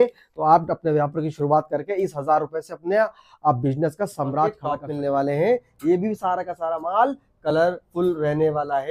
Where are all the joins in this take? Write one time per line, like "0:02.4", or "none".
0:04.7